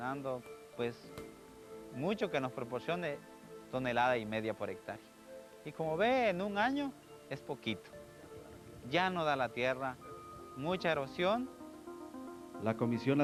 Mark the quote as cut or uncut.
uncut